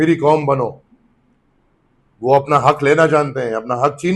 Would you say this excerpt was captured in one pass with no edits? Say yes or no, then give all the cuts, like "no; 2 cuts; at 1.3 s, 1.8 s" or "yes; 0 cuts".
yes; 0 cuts